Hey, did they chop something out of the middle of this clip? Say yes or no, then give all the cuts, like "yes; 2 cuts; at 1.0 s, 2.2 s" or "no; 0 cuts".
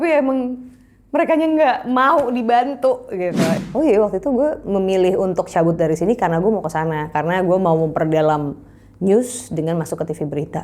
yes; 1 cut; at 3.6 s